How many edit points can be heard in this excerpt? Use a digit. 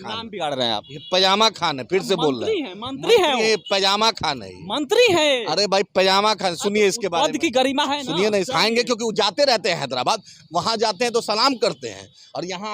1